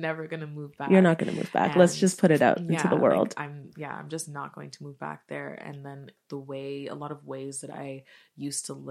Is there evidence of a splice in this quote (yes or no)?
yes